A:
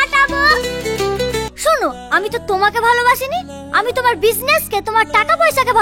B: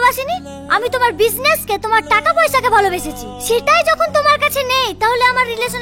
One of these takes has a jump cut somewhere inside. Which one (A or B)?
A